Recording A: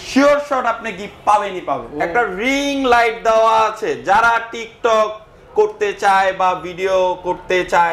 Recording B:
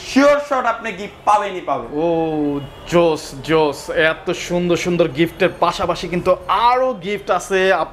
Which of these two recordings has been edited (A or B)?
A